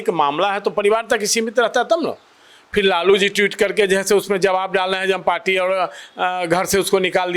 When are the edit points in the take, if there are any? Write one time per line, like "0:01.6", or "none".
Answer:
none

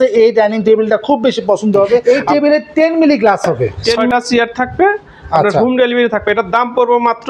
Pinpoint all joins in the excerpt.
0:02.0
0:04.1

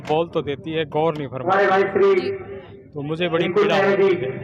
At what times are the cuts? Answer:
none

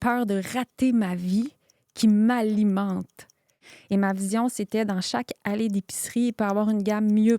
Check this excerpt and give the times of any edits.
0:03.7

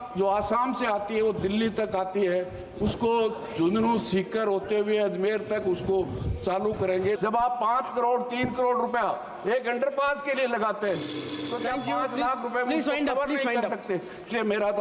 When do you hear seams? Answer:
0:07.2

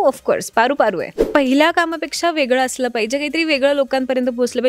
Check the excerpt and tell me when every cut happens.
0:01.1

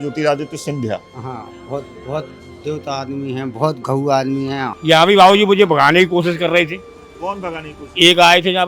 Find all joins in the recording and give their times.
0:04.7

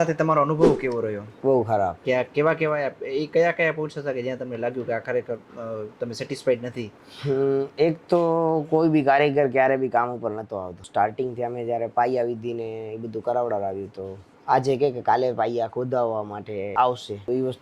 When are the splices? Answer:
none

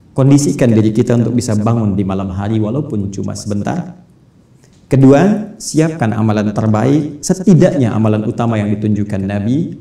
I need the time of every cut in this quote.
none

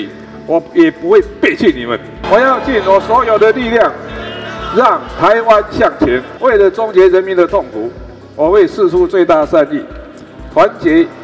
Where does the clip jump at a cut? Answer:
0:02.2
0:06.3

